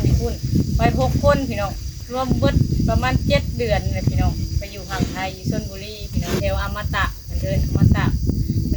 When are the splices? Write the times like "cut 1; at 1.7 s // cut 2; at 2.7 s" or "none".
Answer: cut 1; at 2.1 s // cut 2; at 6.4 s